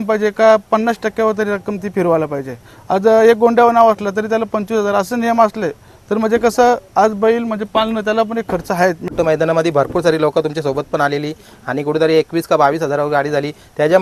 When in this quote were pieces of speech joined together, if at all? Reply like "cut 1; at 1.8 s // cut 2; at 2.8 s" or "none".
cut 1; at 9.1 s